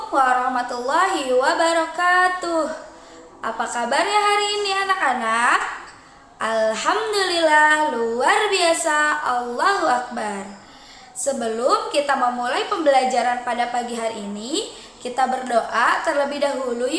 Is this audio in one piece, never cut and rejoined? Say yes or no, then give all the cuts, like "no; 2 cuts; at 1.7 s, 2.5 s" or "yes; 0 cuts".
yes; 0 cuts